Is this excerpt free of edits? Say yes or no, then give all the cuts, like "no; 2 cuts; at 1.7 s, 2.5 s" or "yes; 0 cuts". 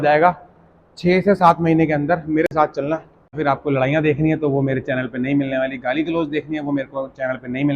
no; 1 cut; at 3.4 s